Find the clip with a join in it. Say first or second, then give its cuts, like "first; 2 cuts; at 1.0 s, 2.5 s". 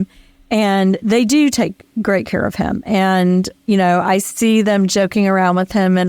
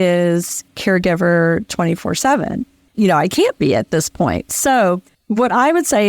second; 1 cut; at 5.1 s